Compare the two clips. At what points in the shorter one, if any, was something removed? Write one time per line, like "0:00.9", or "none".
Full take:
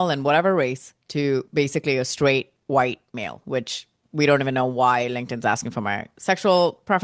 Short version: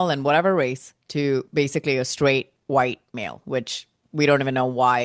none